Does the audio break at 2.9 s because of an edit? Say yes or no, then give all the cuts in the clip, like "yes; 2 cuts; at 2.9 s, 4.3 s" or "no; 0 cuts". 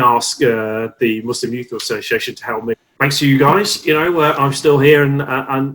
yes; 1 cut; at 2.9 s